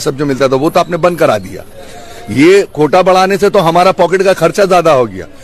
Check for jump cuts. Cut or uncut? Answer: uncut